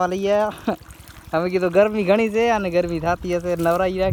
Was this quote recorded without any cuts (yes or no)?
yes